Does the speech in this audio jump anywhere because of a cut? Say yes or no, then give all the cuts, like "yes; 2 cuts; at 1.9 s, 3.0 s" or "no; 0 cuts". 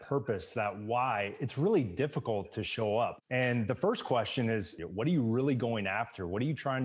yes; 2 cuts; at 3.1 s, 4.7 s